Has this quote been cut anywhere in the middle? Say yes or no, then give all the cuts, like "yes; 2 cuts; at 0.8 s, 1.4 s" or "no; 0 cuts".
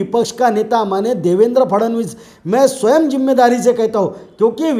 no; 0 cuts